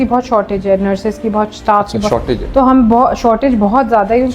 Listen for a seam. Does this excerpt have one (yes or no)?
no